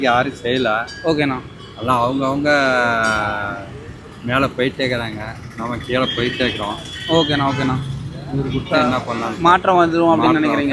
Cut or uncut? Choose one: uncut